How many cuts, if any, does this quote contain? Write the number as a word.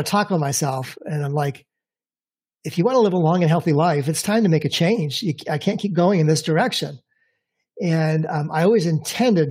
zero